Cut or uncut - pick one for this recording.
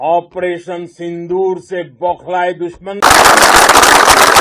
cut